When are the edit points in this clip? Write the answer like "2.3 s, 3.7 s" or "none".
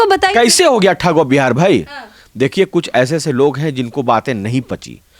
none